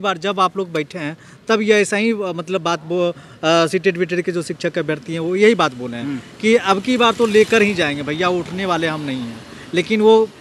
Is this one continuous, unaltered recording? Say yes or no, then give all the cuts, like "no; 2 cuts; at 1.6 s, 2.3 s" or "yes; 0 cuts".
yes; 0 cuts